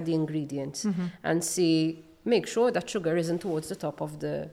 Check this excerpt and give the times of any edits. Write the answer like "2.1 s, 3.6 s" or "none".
none